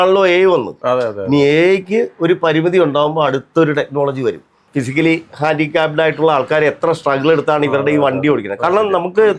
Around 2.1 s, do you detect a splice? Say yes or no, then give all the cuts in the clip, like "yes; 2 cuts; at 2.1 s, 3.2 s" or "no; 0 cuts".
no; 1 cut; at 4.6 s